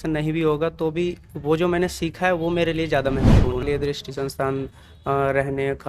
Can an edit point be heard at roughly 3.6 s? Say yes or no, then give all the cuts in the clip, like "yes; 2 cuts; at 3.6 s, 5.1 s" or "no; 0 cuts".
yes; 1 cut; at 3.6 s